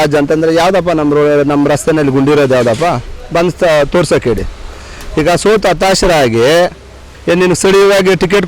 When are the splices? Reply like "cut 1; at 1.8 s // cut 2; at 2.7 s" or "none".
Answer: cut 1; at 7.1 s